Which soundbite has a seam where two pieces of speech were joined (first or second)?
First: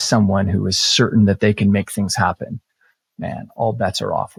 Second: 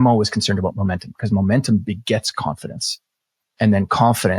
second